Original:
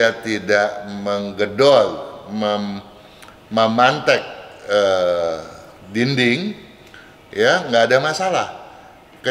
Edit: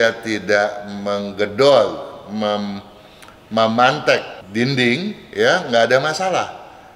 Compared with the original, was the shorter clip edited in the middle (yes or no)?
yes